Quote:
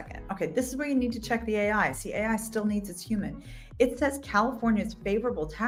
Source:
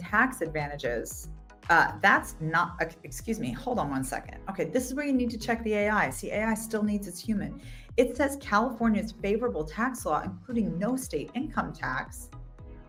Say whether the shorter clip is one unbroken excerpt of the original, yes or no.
yes